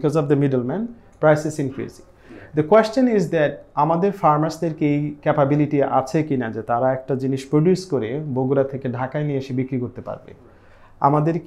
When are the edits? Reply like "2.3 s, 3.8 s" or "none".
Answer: none

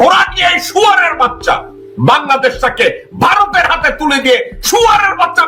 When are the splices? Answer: none

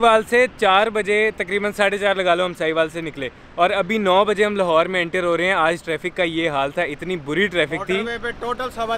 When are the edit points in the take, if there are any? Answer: none

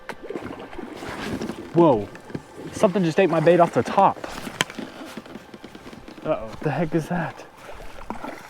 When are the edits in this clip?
6.5 s

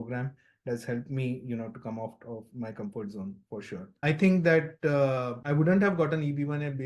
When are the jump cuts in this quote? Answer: 3.9 s

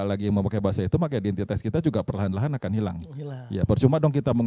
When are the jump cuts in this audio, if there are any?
none

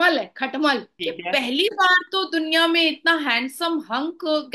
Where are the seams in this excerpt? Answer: 0.9 s

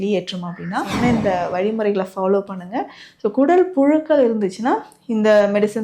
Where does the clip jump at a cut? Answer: 0.9 s

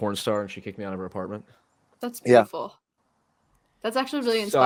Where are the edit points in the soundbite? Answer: none

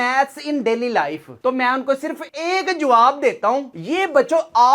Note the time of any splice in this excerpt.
none

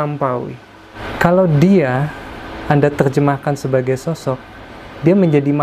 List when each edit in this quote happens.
1.0 s

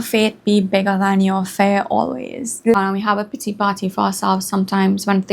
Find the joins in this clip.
2.8 s

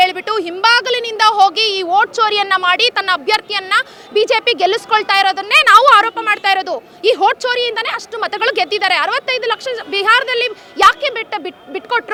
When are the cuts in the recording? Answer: none

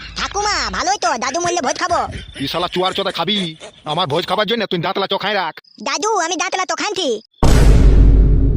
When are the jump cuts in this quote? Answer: 7.3 s

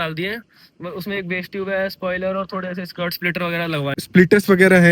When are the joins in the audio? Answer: none

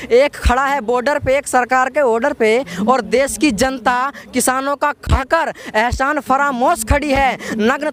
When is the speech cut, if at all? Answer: none

